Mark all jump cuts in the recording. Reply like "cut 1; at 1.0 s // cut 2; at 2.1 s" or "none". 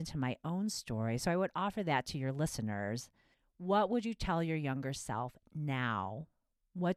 none